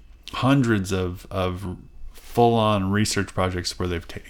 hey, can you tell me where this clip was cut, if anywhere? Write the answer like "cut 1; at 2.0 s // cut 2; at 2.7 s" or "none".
none